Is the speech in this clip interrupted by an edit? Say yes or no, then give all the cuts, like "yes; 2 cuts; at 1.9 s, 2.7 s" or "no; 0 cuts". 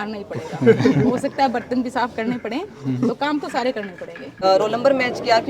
yes; 1 cut; at 4.4 s